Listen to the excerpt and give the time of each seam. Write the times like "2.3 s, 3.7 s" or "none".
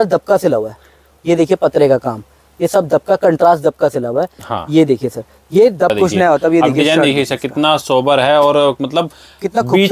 5.9 s